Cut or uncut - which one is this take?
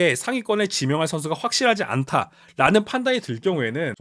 uncut